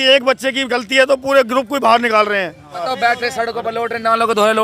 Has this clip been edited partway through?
yes; 1 cut; at 2.9 s

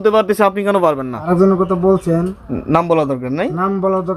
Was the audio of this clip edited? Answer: yes; 1 cut; at 1.2 s

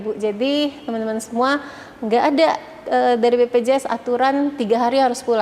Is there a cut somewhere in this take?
no; 0 cuts

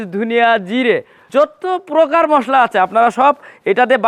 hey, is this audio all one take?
no; 1 cut; at 1.1 s

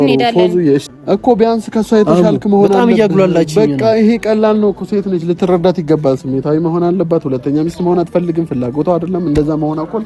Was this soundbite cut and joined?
yes; 1 cut; at 0.9 s

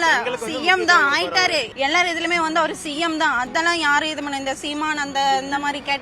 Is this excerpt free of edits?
no; 1 cut; at 1.7 s

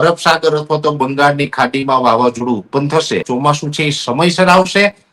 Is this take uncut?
no; 1 cut; at 3.3 s

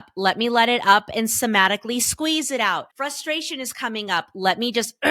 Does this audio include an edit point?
yes; 1 cut; at 2.9 s

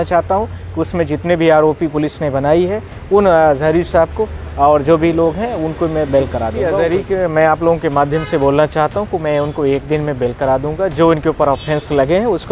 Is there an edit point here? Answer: yes; 1 cut; at 6.7 s

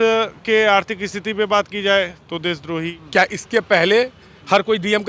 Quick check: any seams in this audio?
yes; 1 cut; at 3.0 s

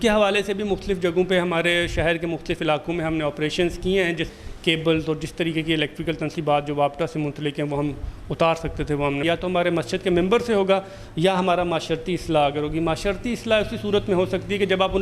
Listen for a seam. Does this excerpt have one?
yes; 2 cuts; at 4.3 s, 9.2 s

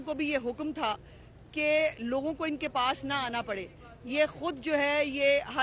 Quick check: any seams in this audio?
no; 0 cuts

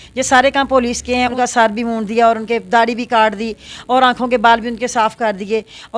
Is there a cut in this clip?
yes; 1 cut; at 1.3 s

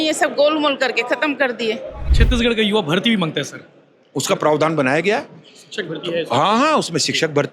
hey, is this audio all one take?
no; 1 cut; at 2.1 s

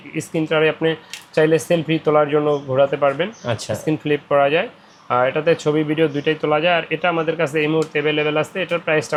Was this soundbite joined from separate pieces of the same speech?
no; 0 cuts

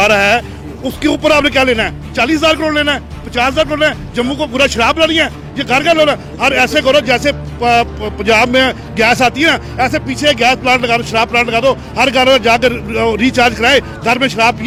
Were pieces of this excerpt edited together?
no; 0 cuts

